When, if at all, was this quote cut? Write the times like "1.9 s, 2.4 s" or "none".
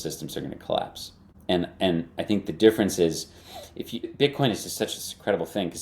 1.3 s, 4.1 s